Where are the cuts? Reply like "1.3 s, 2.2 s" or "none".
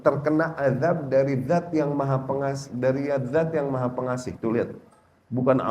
none